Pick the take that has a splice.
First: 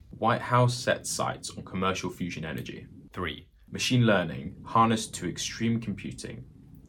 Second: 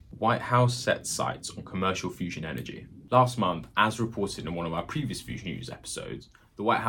first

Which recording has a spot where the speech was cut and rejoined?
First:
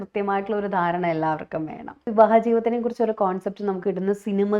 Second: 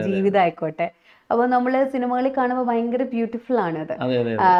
first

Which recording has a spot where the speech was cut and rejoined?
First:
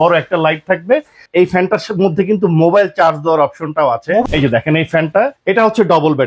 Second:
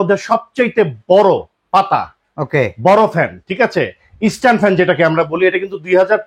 first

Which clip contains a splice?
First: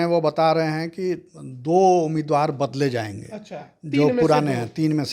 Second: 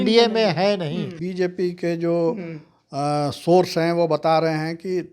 second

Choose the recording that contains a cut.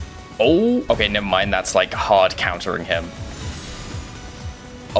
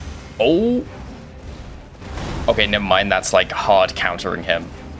first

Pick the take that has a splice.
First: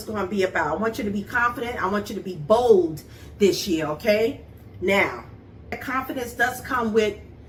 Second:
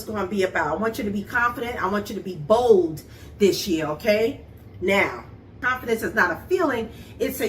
second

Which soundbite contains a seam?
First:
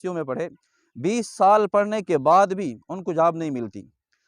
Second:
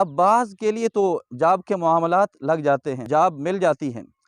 second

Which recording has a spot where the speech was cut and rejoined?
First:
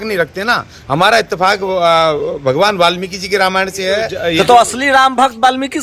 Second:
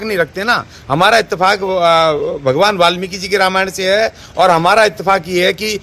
first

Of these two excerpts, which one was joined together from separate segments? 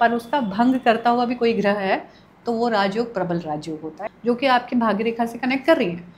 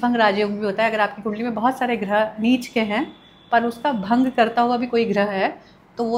first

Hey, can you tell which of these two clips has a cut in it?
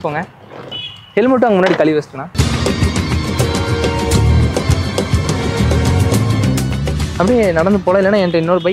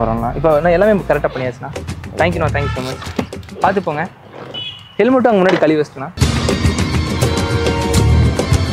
first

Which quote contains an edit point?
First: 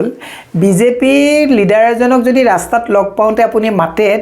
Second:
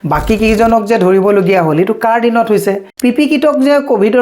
second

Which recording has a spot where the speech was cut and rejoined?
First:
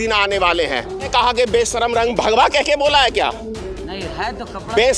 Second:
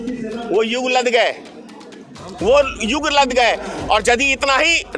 first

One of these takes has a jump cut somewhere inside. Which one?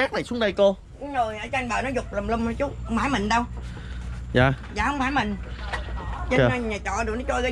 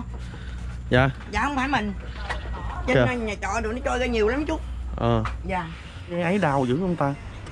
second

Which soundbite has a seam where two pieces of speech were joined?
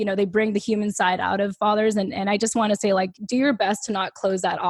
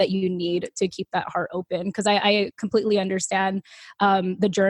first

